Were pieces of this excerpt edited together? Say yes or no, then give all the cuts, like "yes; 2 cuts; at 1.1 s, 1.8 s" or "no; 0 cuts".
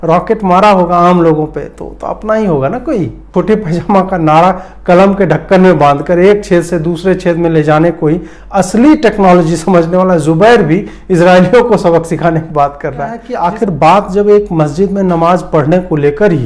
yes; 2 cuts; at 3.2 s, 13.3 s